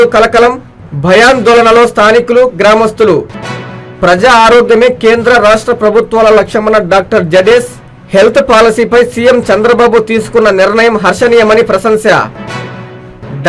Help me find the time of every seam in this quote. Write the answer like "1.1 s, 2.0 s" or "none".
none